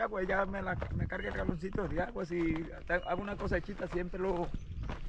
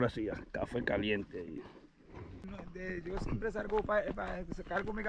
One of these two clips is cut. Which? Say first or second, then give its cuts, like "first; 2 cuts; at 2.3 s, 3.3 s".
second; 1 cut; at 2.5 s